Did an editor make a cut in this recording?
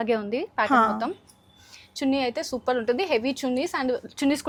no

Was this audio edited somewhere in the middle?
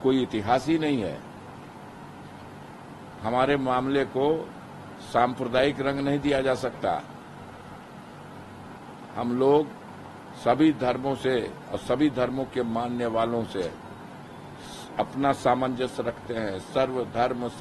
no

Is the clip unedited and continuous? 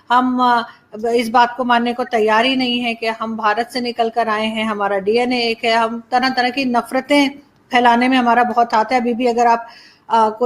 yes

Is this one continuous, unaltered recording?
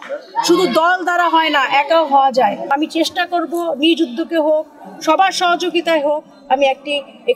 no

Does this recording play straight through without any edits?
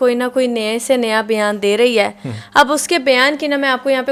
yes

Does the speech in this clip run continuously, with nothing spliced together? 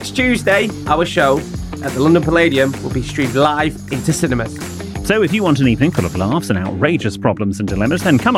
yes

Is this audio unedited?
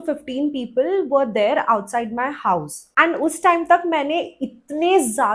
yes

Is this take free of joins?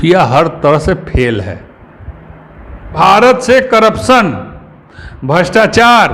no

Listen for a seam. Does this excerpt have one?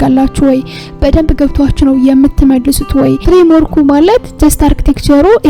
yes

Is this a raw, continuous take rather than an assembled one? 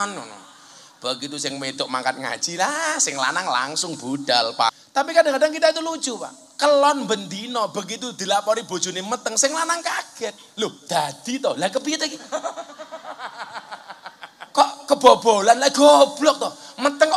no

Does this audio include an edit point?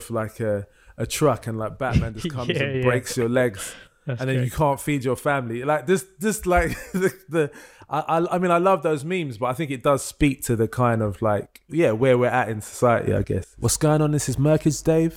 yes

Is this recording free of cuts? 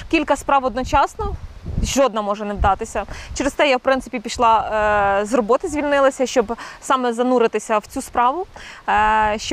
yes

